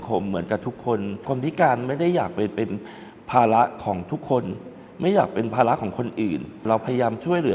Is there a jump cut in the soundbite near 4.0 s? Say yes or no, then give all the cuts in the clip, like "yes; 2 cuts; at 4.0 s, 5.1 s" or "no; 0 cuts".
no; 2 cuts; at 1.2 s, 6.6 s